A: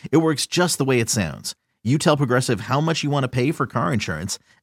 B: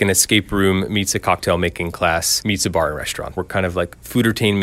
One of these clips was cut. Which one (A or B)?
B